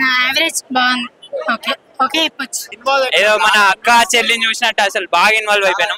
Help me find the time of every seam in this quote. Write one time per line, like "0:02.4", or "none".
0:02.7